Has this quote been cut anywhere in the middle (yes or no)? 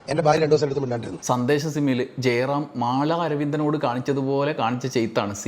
yes